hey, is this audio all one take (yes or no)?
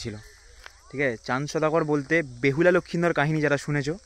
yes